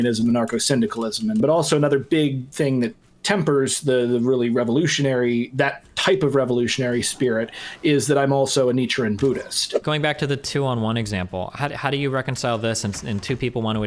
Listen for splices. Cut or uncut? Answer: cut